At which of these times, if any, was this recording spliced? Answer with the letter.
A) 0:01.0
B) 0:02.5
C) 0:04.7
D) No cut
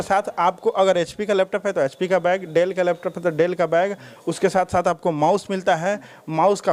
D